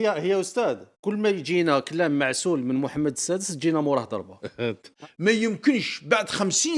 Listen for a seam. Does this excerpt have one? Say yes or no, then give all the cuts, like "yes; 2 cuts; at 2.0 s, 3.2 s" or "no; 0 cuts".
yes; 1 cut; at 4.9 s